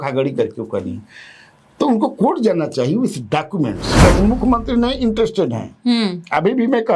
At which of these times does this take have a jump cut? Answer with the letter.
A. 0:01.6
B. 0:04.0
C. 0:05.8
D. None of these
B